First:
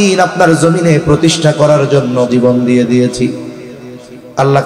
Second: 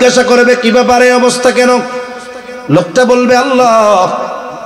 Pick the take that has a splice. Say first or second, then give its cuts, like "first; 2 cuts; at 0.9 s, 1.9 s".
first; 1 cut; at 2.3 s